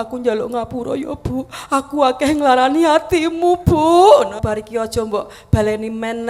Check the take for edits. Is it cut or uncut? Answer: cut